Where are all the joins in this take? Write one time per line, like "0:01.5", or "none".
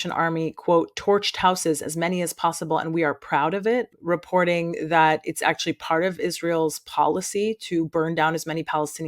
0:03.9